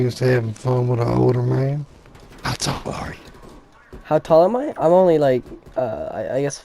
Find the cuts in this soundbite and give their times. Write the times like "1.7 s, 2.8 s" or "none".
1.8 s